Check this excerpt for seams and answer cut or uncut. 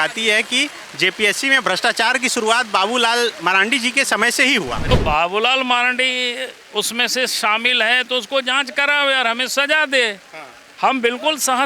cut